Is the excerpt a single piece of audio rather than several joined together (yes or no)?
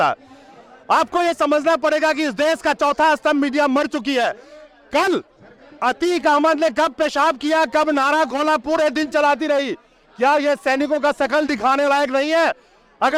yes